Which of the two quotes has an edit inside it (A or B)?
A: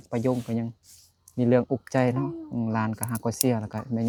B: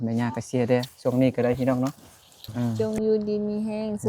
B